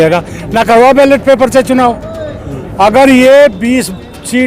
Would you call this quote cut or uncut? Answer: uncut